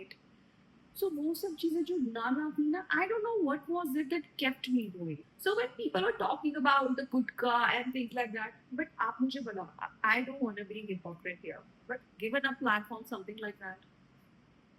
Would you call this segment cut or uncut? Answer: cut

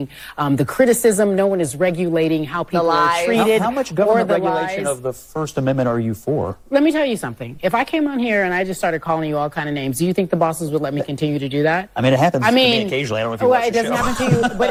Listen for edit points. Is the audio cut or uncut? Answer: uncut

